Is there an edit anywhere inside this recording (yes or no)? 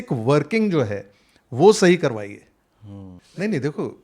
yes